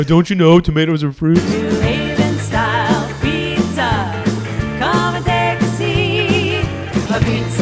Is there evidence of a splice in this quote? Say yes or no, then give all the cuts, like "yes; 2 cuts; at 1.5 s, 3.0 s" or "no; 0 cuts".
yes; 1 cut; at 1.4 s